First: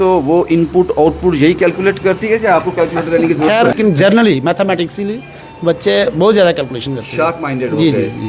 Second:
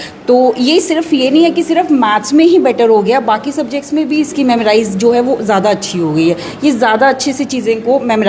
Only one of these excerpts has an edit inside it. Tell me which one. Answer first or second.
first